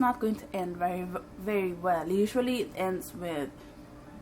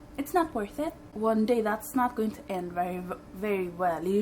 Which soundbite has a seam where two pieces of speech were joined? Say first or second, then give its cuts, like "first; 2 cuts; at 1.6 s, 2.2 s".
second; 1 cut; at 1.0 s